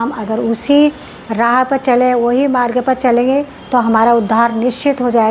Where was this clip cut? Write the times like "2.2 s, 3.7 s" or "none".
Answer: none